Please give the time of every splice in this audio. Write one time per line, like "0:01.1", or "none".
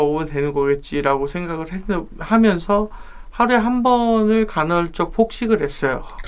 none